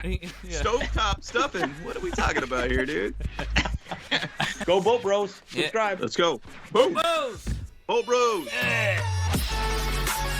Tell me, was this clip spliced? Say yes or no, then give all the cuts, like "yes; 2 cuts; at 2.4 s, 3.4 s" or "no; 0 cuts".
yes; 2 cuts; at 4.5 s, 9.1 s